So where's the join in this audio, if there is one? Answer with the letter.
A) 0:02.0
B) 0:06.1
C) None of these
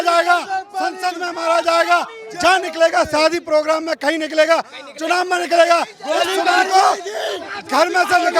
C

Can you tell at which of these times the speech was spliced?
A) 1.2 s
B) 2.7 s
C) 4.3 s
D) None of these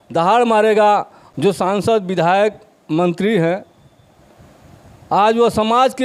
A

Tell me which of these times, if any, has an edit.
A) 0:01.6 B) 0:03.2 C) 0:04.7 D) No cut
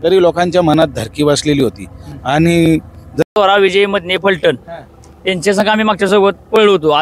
B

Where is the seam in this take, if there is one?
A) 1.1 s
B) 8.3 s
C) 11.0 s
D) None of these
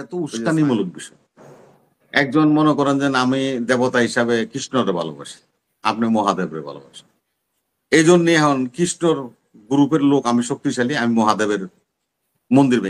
D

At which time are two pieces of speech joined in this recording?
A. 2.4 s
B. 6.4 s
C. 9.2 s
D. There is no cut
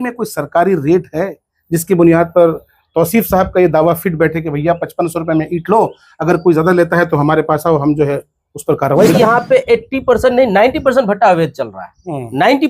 C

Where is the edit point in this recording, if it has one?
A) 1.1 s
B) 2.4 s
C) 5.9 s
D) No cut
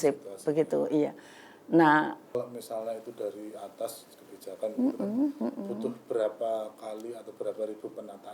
B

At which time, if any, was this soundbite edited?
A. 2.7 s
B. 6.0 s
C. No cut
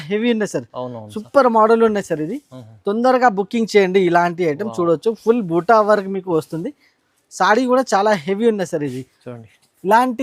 C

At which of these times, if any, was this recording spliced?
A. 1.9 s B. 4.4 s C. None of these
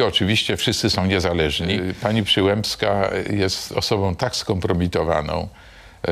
A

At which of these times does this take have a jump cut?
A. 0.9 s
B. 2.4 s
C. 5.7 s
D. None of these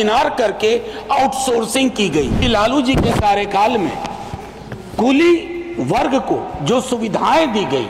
B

